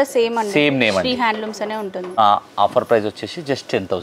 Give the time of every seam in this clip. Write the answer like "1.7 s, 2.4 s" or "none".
2.2 s